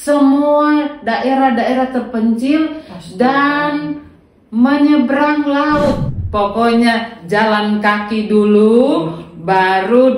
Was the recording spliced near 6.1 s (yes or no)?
yes